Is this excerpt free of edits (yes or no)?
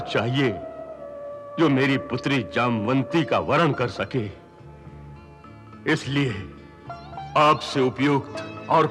yes